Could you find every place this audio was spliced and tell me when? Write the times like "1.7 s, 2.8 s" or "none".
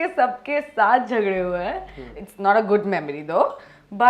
2.1 s